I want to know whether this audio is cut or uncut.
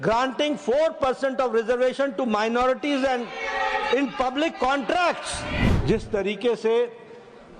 cut